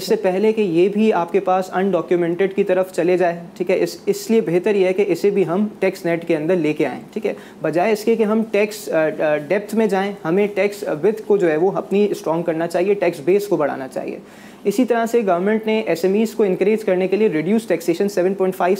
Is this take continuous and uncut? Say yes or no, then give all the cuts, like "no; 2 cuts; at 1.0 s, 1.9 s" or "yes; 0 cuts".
yes; 0 cuts